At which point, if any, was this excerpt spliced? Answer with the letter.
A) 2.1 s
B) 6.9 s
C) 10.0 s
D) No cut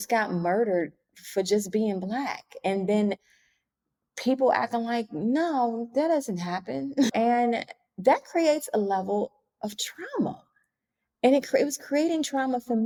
D